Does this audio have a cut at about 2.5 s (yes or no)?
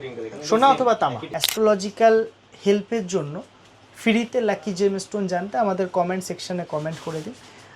no